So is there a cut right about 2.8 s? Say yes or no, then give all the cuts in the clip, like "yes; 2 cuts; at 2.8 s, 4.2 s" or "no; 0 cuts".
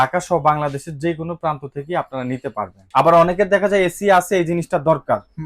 yes; 1 cut; at 2.8 s